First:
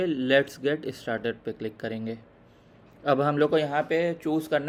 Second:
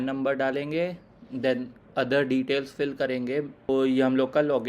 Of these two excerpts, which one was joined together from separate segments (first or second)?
second